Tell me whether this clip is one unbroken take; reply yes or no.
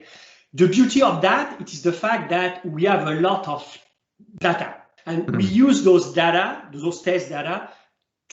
no